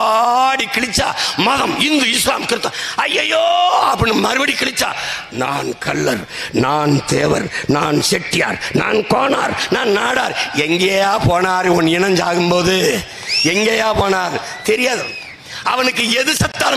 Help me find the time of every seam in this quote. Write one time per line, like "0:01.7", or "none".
none